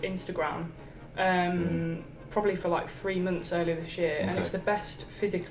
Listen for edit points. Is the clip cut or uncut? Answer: uncut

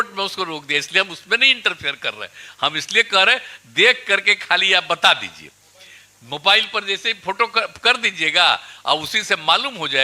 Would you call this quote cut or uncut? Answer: uncut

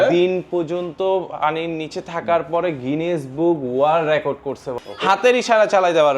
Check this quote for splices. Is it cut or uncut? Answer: cut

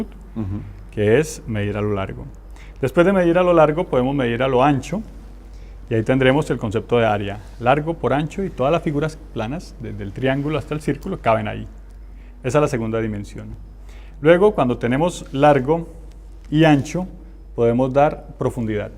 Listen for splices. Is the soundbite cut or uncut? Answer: cut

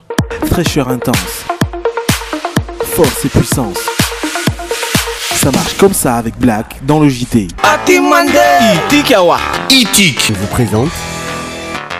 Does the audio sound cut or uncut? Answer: uncut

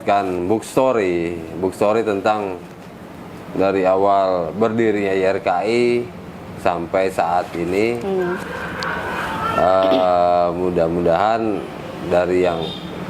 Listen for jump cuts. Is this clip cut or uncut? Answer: uncut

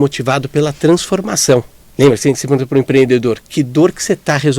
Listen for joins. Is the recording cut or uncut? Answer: cut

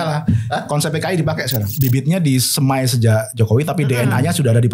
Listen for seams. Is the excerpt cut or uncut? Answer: cut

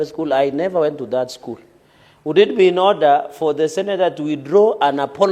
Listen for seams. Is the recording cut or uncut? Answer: uncut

